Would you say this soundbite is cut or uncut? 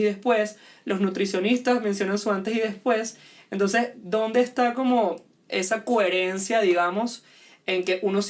uncut